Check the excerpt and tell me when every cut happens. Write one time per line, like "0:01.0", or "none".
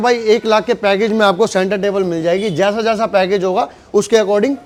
none